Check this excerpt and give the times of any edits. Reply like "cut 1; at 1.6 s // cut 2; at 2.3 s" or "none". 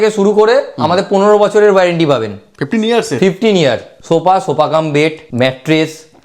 cut 1; at 3.9 s // cut 2; at 5.2 s